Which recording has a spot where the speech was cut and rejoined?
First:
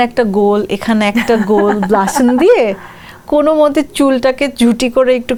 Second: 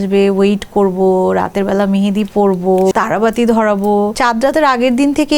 second; 2 cuts; at 2.9 s, 4.1 s

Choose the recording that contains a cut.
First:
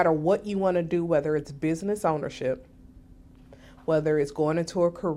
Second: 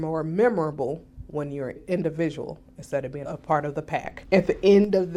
second; 3 cuts; at 1.8 s, 3.2 s, 4.1 s

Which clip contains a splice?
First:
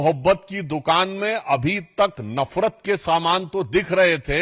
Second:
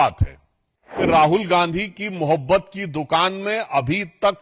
second; 1 cut; at 1.0 s

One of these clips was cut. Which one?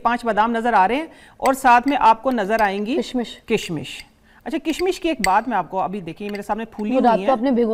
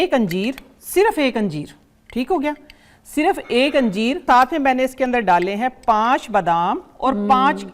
second; 1 cut; at 4.2 s

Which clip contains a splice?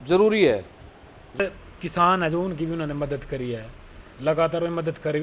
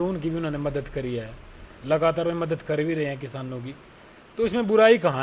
first; 1 cut; at 1.4 s

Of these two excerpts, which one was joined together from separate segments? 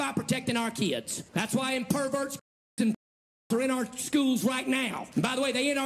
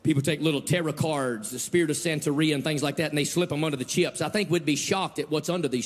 first; 2 cuts; at 1.2 s, 5.0 s

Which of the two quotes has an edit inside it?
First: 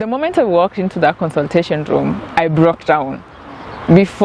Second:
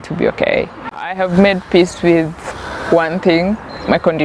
second; 1 cut; at 1.1 s

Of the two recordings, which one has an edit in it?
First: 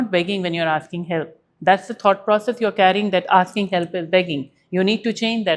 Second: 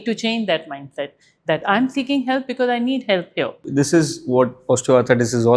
second; 1 cut; at 3.6 s

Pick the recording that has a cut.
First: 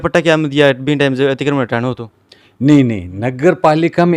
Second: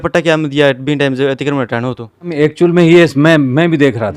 second; 1 cut; at 2.3 s

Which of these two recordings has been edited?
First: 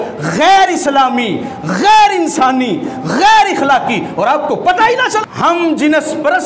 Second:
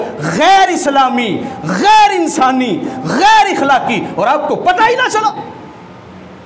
first; 1 cut; at 5.2 s

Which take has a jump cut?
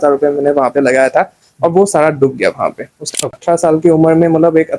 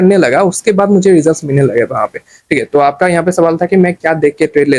first; 1 cut; at 3.0 s

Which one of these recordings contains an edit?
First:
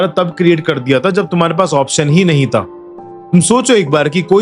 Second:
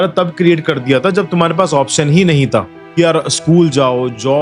second; 1 cut; at 2.8 s

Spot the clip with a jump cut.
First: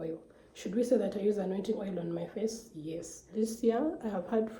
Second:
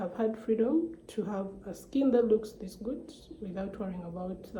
first; 1 cut; at 3.2 s

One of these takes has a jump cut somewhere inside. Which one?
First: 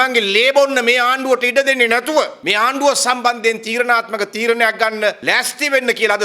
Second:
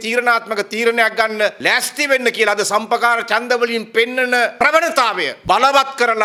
first; 1 cut; at 2.4 s

